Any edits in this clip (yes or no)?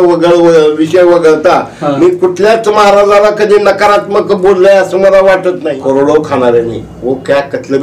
yes